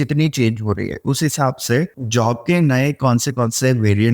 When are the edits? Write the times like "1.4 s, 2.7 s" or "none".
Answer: 2.0 s

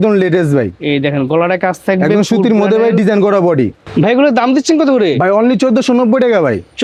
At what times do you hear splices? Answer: none

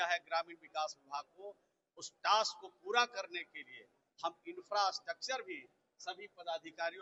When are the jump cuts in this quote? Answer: none

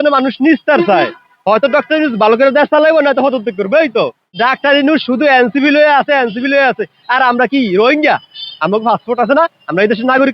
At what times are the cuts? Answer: 4.2 s

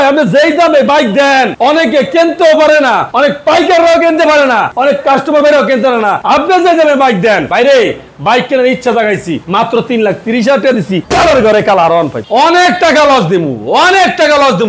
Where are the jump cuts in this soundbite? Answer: 3.1 s, 4.7 s, 6.2 s, 7.5 s, 9.4 s, 11.0 s, 12.2 s

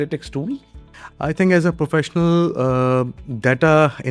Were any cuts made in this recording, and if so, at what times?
none

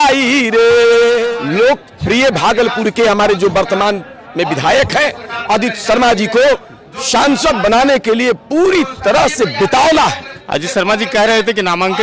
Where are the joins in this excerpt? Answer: 1.3 s, 10.3 s

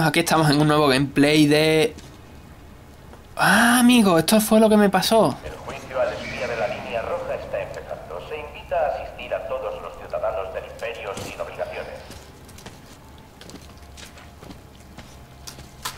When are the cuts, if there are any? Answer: 5.5 s

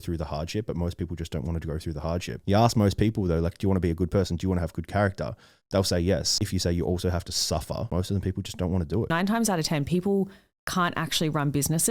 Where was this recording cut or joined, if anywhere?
2.3 s, 6.3 s, 7.9 s, 9.1 s

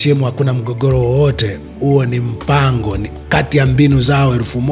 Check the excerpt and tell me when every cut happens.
none

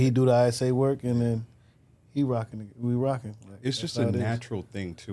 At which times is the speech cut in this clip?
none

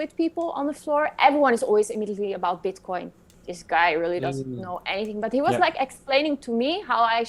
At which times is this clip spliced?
3.2 s

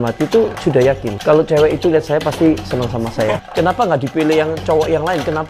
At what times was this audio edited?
1.1 s, 3.4 s

